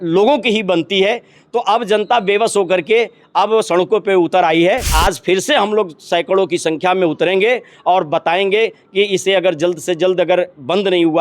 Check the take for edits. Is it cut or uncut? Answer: cut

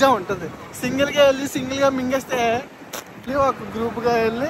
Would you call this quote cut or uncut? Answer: cut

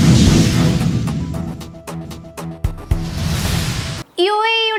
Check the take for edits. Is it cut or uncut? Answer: uncut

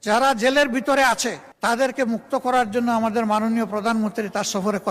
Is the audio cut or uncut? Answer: cut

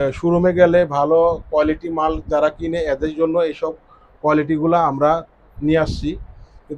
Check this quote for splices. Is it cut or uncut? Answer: uncut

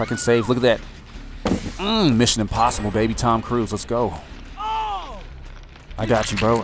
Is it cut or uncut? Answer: uncut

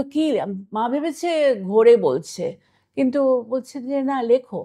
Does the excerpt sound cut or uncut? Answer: uncut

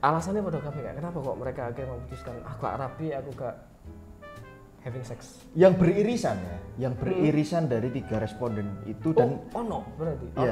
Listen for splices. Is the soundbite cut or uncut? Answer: uncut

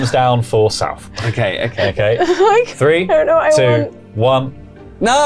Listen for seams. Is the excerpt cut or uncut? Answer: uncut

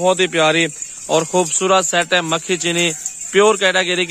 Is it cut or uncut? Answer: uncut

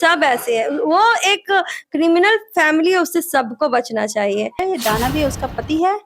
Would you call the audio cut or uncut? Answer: cut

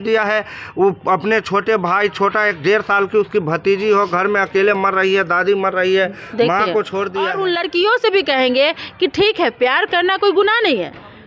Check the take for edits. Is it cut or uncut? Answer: cut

